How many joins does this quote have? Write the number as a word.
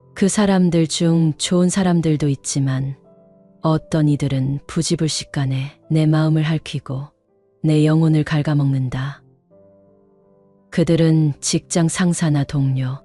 zero